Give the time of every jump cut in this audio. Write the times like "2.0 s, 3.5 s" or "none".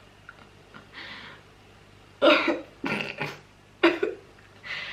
none